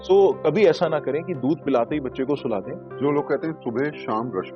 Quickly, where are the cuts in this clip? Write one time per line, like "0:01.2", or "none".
0:02.8